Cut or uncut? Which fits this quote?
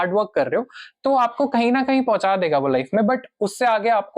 uncut